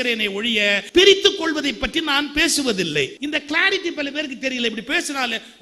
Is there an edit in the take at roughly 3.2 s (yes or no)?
yes